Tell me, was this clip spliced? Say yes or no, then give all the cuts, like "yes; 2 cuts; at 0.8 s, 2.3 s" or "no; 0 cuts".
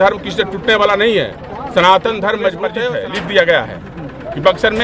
yes; 1 cut; at 2.8 s